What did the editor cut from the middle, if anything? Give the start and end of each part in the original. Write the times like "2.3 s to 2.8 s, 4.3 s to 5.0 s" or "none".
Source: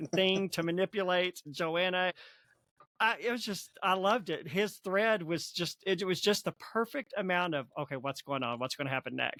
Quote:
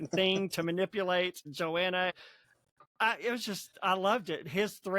none